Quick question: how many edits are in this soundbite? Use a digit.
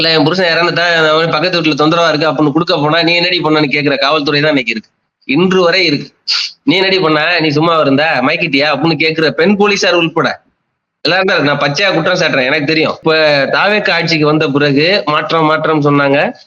1